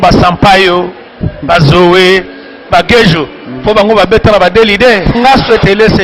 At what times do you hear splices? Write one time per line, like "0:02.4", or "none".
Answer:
0:05.1